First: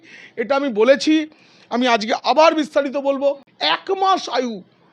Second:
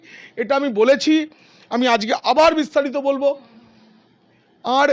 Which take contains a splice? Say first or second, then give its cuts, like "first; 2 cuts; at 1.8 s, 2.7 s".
first; 1 cut; at 3.5 s